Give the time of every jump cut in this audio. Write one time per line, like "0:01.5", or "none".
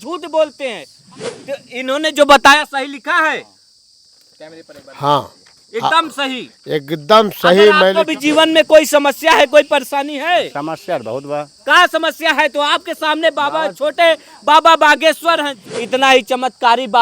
0:00.9
0:08.0
0:15.5